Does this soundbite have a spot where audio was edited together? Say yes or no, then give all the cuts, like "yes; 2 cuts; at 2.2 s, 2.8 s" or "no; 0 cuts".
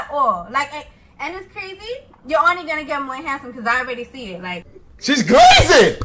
yes; 1 cut; at 4.7 s